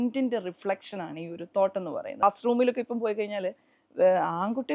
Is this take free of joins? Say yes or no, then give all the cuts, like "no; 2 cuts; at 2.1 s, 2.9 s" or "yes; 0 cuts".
no; 1 cut; at 2.2 s